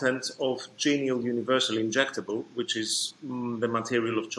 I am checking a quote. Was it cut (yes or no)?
no